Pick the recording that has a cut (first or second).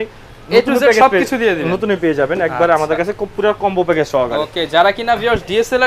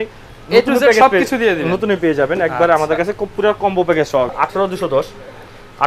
second